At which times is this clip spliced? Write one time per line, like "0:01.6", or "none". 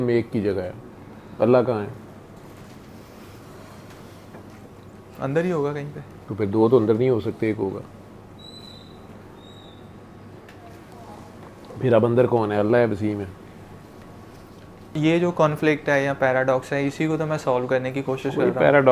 0:14.9